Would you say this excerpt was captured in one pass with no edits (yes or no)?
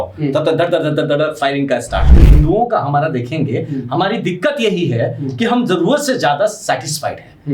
no